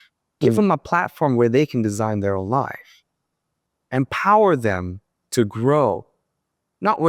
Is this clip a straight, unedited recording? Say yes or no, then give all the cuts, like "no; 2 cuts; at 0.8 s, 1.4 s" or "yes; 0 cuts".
yes; 0 cuts